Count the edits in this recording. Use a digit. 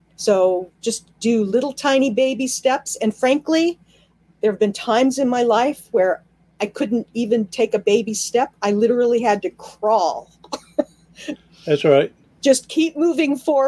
0